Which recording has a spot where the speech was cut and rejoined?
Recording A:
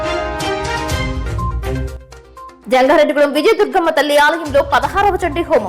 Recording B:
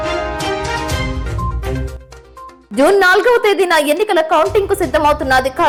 A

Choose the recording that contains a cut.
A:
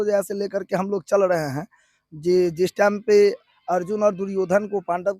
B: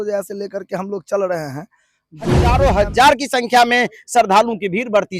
B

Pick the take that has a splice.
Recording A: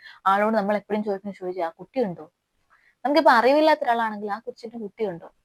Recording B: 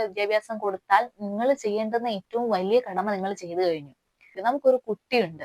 B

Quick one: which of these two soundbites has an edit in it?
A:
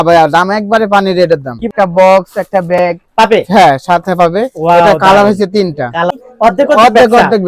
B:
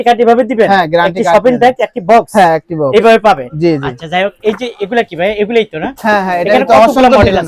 A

